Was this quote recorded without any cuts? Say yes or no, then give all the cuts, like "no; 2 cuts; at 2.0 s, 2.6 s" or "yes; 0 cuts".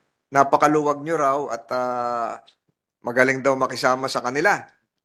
yes; 0 cuts